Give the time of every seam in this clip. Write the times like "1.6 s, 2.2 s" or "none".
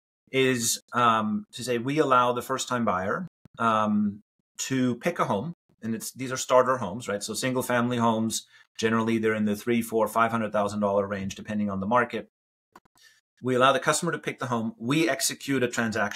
none